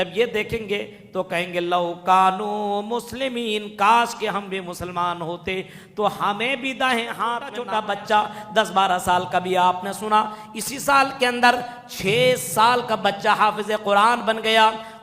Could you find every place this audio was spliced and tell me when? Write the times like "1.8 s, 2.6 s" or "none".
7.5 s